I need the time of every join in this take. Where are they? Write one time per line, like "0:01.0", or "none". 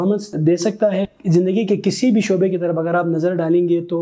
0:01.1